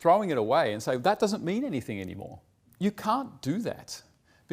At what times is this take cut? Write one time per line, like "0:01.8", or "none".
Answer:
0:02.7